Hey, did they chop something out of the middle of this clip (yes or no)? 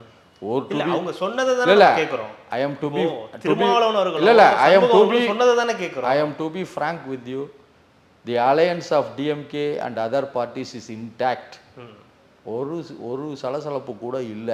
no